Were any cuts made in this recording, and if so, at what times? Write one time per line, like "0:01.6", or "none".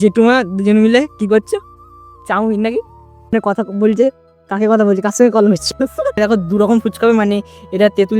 0:03.3
0:06.2